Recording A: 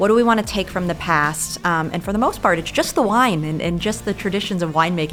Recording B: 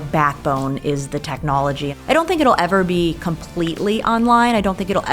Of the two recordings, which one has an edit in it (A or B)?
B